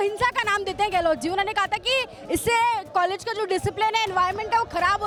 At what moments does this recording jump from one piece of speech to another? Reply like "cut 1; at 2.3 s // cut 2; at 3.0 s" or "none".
none